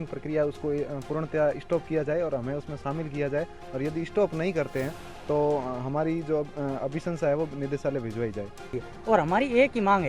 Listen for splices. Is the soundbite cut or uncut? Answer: cut